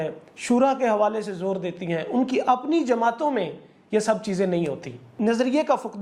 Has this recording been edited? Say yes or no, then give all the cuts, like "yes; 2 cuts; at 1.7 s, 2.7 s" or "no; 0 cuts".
yes; 1 cut; at 5.0 s